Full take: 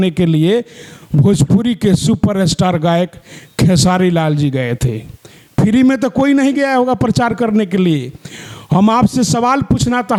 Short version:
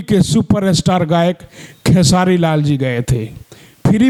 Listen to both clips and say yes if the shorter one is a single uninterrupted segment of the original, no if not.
yes